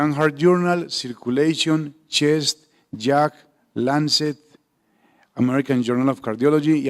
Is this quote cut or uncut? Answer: cut